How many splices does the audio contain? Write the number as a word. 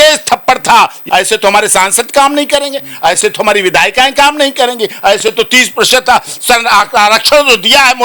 one